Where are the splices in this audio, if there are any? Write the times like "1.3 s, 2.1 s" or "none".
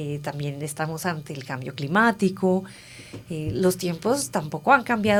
none